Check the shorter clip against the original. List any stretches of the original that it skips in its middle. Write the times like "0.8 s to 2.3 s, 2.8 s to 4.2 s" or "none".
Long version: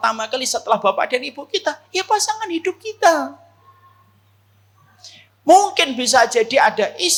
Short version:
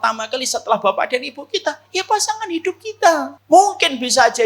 3.3 s to 5.3 s